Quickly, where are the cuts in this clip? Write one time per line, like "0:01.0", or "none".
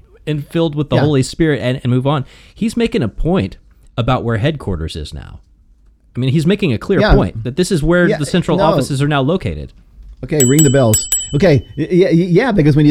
none